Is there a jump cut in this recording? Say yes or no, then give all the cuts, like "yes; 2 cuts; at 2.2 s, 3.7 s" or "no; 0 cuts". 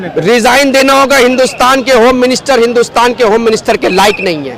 no; 0 cuts